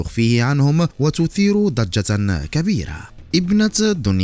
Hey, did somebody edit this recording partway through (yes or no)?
yes